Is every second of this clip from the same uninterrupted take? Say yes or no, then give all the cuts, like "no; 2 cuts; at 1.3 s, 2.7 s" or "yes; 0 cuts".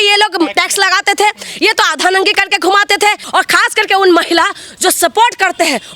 no; 1 cut; at 3.2 s